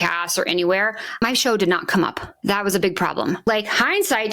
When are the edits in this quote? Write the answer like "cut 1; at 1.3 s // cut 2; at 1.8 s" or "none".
cut 1; at 1.2 s // cut 2; at 2.4 s // cut 3; at 3.5 s